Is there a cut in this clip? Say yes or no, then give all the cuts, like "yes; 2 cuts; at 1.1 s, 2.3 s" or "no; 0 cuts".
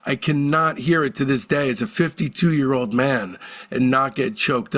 no; 0 cuts